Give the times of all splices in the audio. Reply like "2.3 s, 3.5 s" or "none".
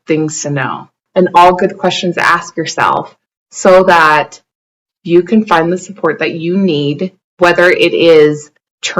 1.0 s